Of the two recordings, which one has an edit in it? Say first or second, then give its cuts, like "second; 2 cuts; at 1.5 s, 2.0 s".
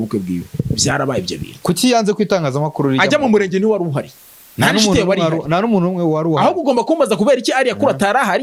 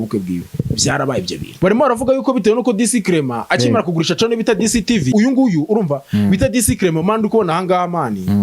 second; 2 cuts; at 1.5 s, 5.1 s